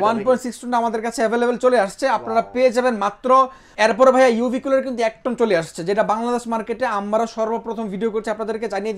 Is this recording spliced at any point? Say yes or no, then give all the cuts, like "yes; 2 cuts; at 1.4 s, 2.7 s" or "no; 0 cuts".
yes; 1 cut; at 3.6 s